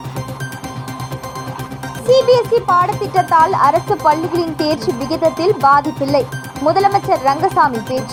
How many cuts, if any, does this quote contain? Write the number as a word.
zero